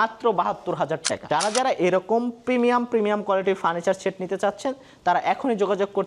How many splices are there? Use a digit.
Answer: 1